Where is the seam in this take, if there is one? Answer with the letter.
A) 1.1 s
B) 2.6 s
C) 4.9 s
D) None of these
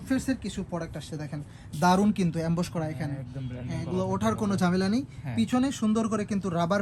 D